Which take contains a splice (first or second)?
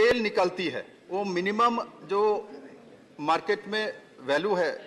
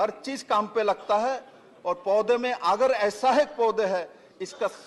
first